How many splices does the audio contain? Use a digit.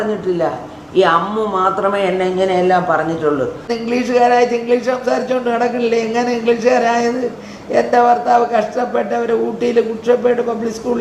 1